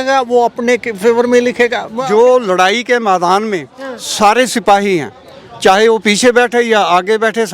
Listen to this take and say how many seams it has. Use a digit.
1